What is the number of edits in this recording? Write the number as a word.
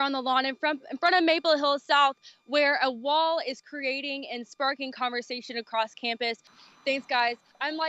one